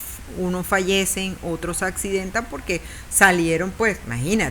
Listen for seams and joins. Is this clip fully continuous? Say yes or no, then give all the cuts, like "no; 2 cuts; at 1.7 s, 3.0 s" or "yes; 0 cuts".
yes; 0 cuts